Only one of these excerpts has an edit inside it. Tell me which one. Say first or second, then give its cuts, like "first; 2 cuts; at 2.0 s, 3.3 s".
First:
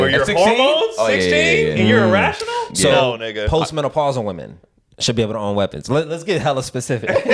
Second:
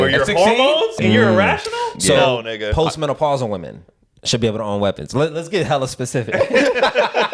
second; 1 cut; at 1.0 s